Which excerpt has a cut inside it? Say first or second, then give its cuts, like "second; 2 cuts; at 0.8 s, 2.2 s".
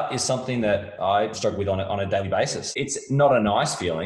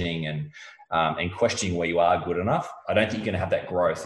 first; 2 cuts; at 1.3 s, 2.6 s